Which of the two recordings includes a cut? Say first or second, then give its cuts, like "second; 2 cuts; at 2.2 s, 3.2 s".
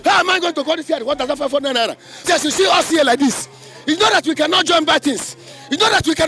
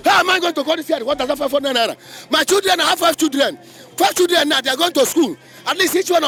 first; 1 cut; at 2.2 s